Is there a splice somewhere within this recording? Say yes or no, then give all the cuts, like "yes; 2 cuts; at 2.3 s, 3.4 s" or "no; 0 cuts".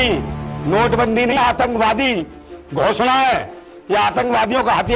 yes; 1 cut; at 1.3 s